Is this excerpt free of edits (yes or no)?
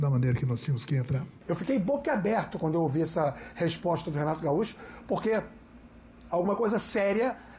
no